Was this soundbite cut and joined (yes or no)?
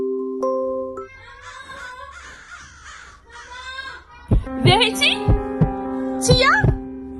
yes